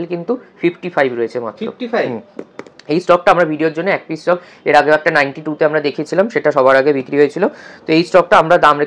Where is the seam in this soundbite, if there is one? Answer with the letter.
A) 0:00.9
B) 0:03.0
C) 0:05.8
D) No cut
D